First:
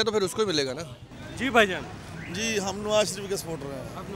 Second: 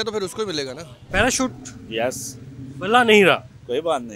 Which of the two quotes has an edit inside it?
second; 1 cut; at 0.9 s

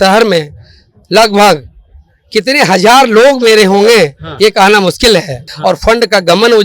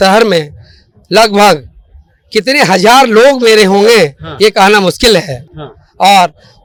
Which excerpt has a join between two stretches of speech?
first; 1 cut; at 5.5 s

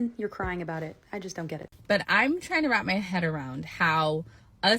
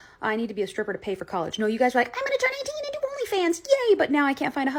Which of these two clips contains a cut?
first; 1 cut; at 2.1 s

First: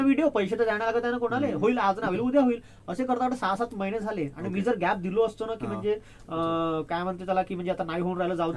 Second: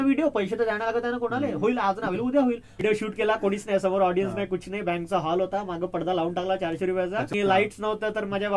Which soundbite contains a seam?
second; 2 cuts; at 2.8 s, 7.2 s

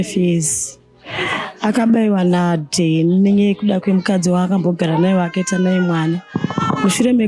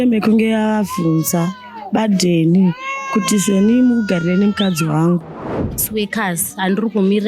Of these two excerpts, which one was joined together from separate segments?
second; 1 cut; at 5.8 s

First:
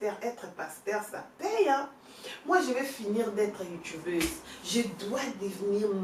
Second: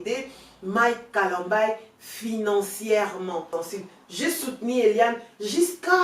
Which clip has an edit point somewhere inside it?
second; 1 cut; at 3.5 s

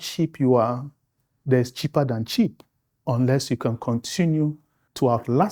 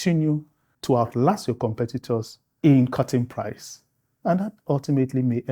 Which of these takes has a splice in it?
second; 1 cut; at 2.4 s

